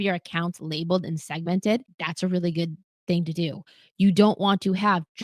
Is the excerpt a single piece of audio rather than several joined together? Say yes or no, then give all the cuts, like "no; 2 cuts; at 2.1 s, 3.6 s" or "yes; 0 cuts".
no; 1 cut; at 2.0 s